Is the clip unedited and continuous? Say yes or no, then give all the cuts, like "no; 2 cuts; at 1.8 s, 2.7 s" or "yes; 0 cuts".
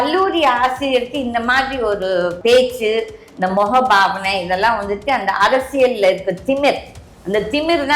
no; 1 cut; at 2.4 s